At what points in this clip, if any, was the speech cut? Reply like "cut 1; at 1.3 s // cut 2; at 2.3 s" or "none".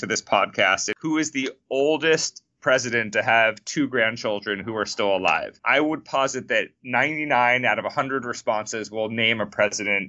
cut 1; at 0.9 s // cut 2; at 5.6 s

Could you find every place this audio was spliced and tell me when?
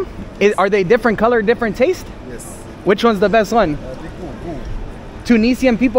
none

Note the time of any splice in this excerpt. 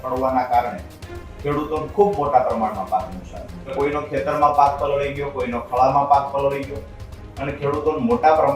cut 1; at 3.7 s

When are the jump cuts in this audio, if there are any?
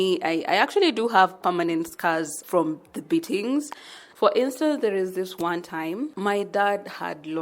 cut 1; at 2.4 s // cut 2; at 4.0 s // cut 3; at 6.1 s

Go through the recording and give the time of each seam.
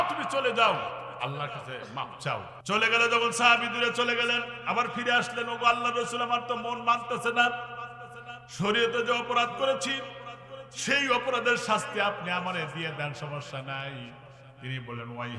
cut 1; at 2.5 s

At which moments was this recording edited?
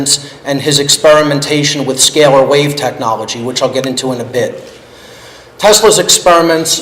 cut 1; at 4.8 s

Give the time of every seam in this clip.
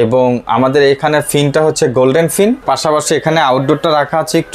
cut 1; at 2.6 s

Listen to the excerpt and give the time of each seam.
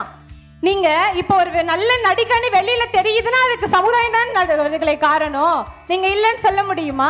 none

